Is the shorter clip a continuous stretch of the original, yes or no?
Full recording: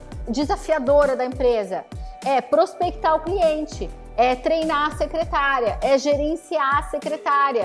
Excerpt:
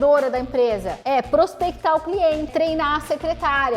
no